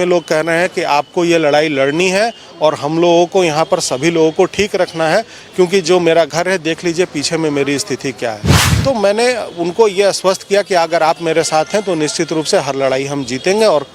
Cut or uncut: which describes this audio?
uncut